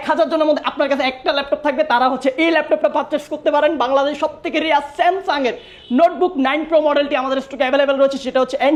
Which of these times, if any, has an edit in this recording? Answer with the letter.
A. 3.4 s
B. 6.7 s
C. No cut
C